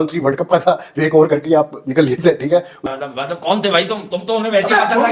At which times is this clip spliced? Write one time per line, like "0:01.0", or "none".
0:02.8